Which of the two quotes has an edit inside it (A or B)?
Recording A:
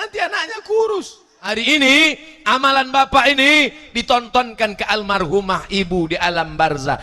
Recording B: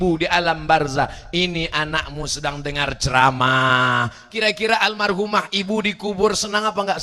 A